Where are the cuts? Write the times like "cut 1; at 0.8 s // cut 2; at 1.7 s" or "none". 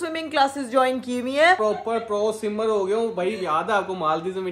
cut 1; at 1.6 s